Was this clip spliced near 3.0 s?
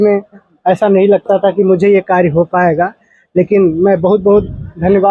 no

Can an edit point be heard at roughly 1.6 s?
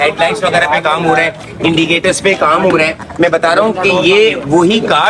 no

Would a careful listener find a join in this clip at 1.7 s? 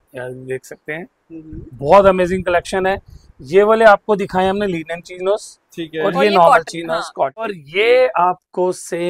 no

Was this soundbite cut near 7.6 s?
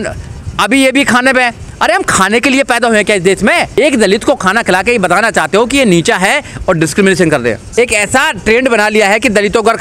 yes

